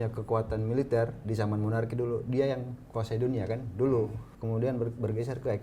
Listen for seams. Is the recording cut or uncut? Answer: cut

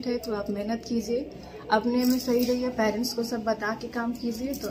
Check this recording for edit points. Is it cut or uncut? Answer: uncut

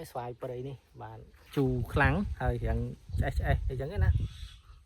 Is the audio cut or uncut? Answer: cut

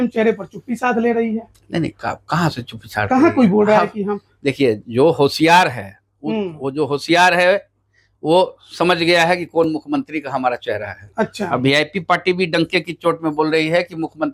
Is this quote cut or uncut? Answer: uncut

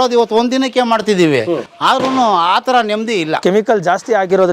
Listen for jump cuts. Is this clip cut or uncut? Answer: cut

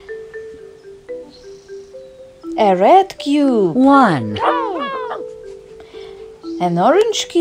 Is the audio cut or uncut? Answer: uncut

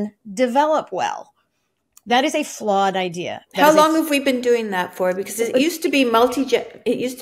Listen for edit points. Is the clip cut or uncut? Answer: uncut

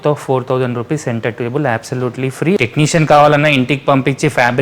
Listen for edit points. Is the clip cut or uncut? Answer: cut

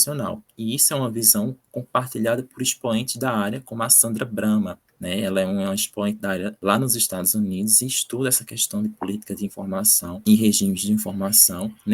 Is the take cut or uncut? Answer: cut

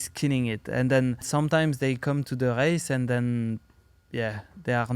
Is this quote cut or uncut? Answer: cut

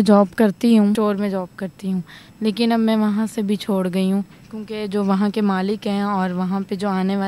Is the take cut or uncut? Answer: cut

